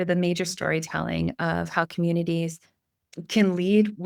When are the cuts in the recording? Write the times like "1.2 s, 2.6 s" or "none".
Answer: none